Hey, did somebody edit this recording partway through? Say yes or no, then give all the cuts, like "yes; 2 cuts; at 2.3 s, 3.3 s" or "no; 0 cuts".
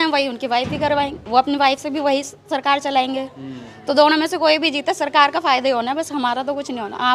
no; 0 cuts